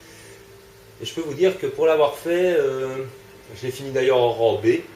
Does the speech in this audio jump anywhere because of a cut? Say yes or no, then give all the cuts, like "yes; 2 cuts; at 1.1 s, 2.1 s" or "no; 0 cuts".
yes; 1 cut; at 2.6 s